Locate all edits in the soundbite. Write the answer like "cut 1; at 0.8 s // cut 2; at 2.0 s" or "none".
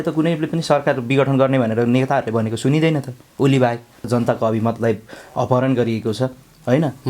cut 1; at 4.1 s